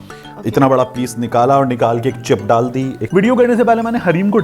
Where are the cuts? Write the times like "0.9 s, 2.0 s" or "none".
3.0 s